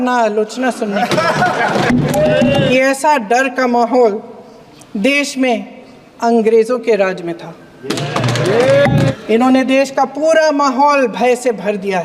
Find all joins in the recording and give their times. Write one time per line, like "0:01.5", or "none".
0:02.6
0:09.1